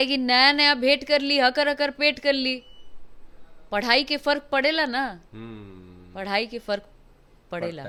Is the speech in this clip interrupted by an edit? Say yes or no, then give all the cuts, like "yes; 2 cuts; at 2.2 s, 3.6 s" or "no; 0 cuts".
no; 0 cuts